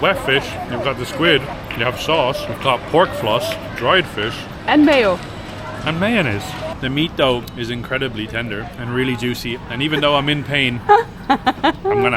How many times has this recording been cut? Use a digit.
6